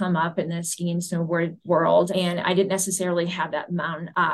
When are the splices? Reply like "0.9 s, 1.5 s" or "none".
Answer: 2.1 s